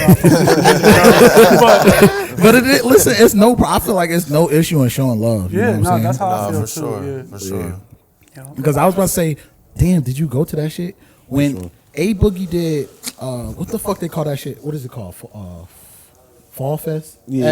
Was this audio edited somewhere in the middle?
no; 0 cuts

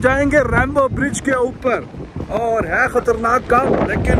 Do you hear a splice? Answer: no; 0 cuts

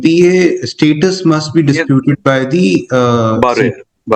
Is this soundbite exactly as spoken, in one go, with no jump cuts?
yes; 0 cuts

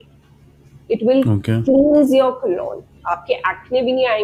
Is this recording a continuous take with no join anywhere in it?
yes; 0 cuts

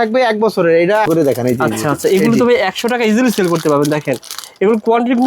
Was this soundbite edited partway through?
yes; 1 cut; at 1.1 s

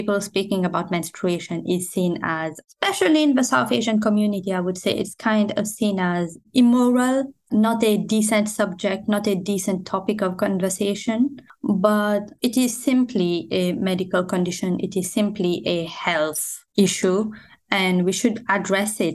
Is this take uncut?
yes; 0 cuts

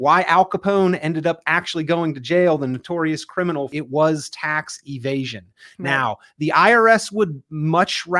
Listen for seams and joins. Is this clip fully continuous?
no; 1 cut; at 3.7 s

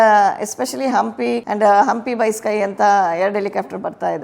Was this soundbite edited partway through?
yes; 1 cut; at 1.4 s

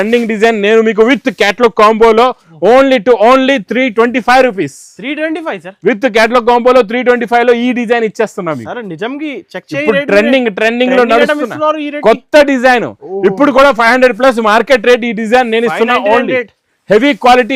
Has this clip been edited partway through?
no; 0 cuts

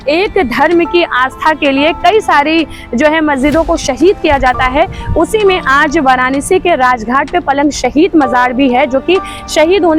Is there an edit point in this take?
no; 0 cuts

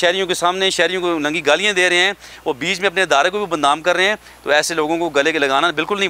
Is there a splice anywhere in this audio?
no; 0 cuts

